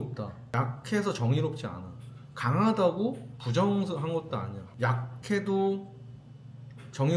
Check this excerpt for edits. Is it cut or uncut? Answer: uncut